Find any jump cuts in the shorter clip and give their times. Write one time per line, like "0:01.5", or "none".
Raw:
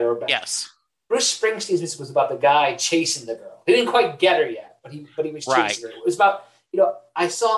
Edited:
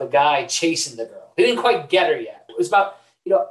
0:02.4

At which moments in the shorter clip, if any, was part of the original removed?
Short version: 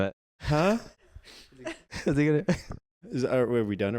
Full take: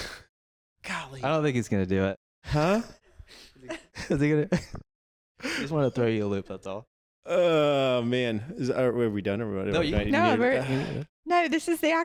0:03.0

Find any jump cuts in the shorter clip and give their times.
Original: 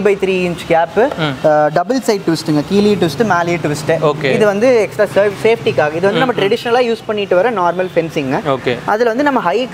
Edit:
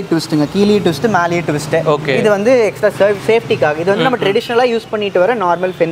none

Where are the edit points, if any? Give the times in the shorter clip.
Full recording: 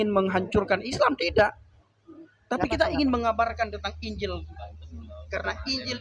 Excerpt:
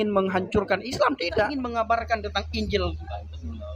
0:01.7

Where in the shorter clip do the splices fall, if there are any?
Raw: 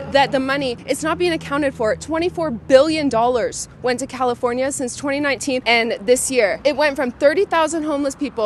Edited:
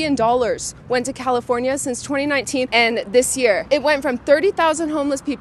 none

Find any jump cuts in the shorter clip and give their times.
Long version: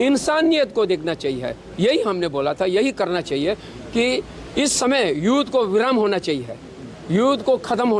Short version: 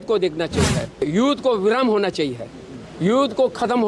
0:01.0

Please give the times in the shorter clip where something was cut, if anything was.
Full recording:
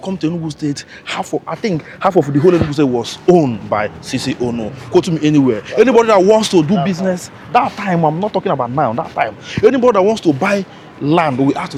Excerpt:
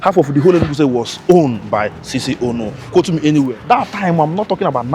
0:03.6

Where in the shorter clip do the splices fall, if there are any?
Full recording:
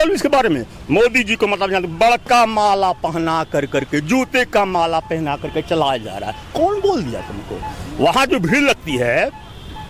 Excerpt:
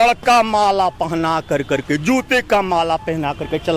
none

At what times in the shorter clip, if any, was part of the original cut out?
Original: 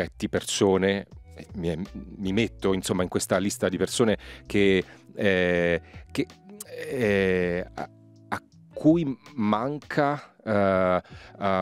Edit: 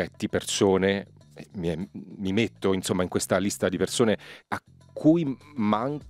0:04.3

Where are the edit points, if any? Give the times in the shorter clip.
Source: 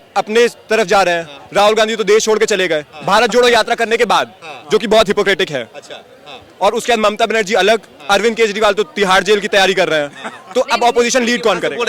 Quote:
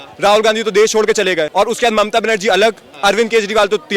0:01.5

